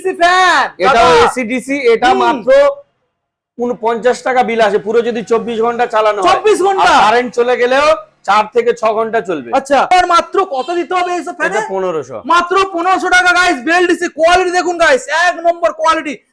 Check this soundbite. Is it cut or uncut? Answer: cut